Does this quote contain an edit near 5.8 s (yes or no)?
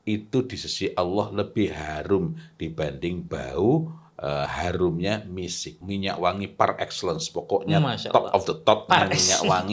yes